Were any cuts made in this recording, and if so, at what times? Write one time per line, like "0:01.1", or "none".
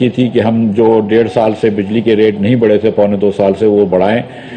none